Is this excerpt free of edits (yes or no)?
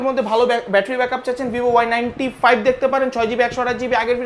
yes